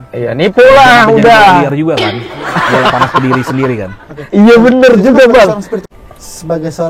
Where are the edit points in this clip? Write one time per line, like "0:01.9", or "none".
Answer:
0:05.8